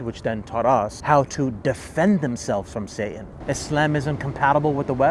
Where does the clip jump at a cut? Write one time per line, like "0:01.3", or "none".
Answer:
0:01.0
0:03.3